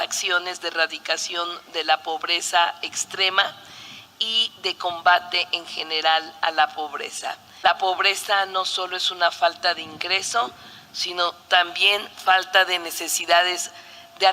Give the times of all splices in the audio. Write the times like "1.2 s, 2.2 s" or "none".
7.5 s